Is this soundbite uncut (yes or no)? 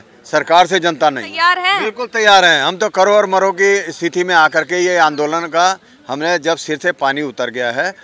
no